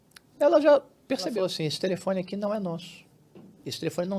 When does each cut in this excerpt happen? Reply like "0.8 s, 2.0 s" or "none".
1.3 s